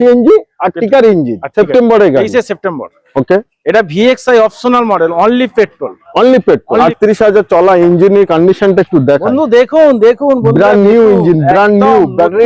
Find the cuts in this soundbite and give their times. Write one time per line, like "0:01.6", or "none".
0:01.5
0:06.8